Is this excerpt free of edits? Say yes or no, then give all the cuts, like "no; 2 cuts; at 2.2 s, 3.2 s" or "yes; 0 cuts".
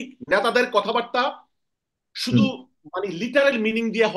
yes; 0 cuts